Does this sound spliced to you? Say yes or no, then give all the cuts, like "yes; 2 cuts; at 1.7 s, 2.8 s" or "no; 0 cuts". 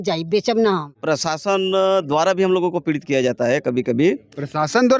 yes; 1 cut; at 0.9 s